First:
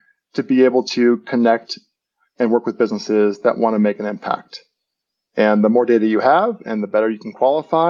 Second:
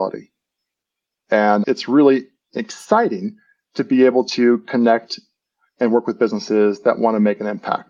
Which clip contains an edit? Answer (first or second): second